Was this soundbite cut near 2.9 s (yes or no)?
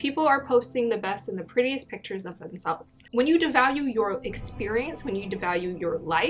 yes